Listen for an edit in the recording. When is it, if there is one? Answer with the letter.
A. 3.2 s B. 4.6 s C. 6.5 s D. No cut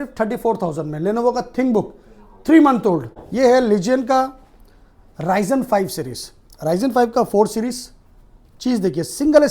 A